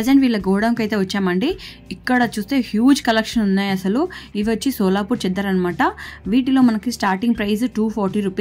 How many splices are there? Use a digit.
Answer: 0